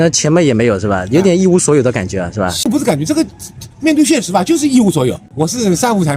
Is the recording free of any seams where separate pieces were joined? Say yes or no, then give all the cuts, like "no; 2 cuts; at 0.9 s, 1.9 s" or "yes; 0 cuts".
no; 2 cuts; at 2.7 s, 5.2 s